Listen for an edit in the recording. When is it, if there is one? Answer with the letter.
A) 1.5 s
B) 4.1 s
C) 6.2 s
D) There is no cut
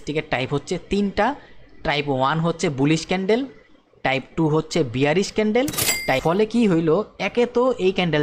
C